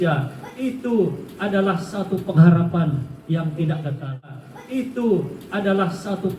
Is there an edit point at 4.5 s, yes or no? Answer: yes